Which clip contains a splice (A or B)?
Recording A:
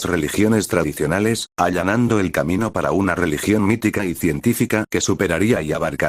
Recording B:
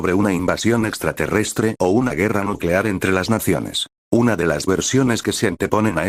A